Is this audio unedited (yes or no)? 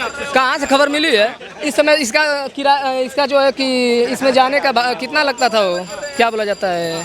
yes